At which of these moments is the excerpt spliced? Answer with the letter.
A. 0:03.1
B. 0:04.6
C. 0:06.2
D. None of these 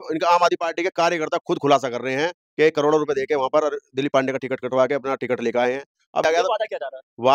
C